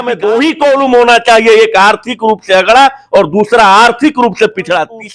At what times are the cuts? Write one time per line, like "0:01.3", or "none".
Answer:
none

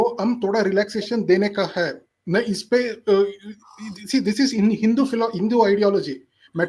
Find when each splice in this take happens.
none

